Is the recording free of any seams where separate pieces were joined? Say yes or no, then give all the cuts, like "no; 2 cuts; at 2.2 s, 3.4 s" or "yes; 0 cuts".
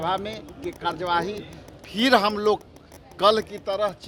yes; 0 cuts